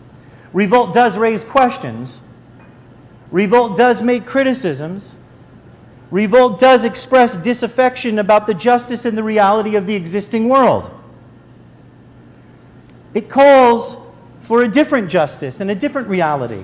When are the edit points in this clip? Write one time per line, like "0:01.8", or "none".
none